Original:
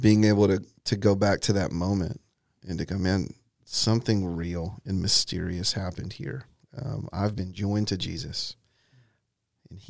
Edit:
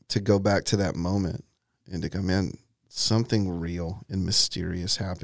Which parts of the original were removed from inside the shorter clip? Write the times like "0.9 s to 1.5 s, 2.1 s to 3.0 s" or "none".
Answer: none